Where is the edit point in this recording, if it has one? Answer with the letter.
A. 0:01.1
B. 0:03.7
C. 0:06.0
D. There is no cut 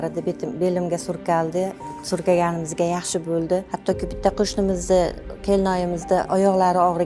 B